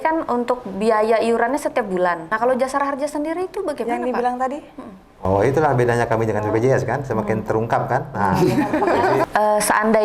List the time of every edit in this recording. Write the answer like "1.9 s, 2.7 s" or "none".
2.3 s, 9.2 s